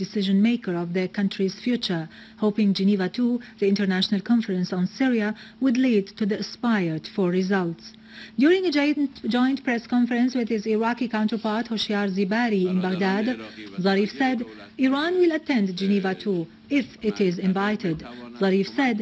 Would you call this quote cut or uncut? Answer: cut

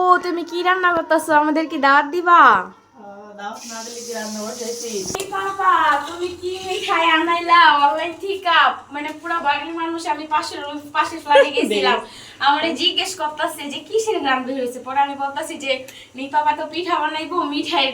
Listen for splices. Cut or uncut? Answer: cut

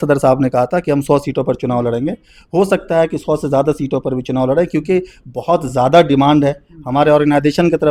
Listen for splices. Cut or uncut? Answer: uncut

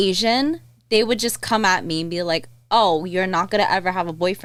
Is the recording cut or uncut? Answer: uncut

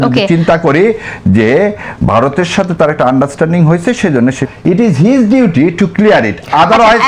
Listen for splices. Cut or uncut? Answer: cut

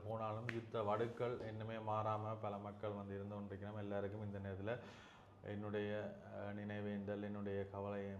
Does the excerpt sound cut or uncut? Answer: uncut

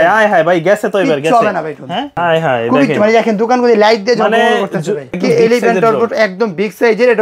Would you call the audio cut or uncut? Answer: cut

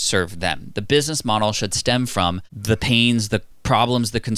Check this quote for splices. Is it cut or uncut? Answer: cut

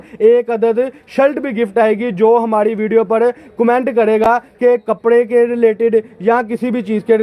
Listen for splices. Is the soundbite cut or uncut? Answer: uncut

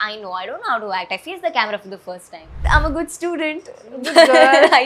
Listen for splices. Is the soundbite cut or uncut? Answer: cut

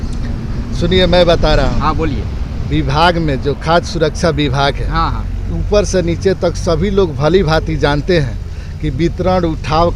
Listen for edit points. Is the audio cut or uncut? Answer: uncut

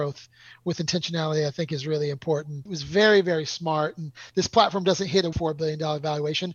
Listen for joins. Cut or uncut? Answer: cut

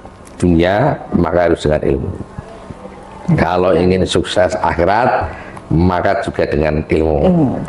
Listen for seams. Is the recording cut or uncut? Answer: uncut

